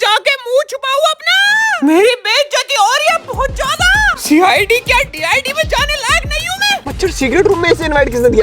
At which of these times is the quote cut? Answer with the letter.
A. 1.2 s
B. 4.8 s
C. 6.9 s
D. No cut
C